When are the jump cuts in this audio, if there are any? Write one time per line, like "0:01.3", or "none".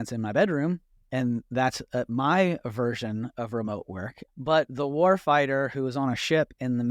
none